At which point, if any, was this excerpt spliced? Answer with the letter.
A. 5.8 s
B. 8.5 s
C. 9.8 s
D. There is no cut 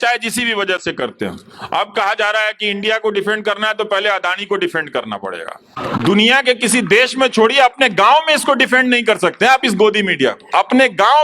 A